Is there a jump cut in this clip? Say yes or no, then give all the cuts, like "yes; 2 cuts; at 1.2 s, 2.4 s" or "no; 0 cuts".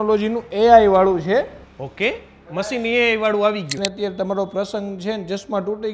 yes; 1 cut; at 3.8 s